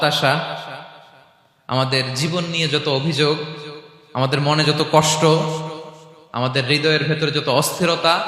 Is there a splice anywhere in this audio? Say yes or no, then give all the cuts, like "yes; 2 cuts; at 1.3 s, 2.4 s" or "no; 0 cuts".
no; 0 cuts